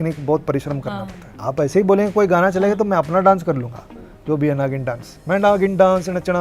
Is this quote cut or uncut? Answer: cut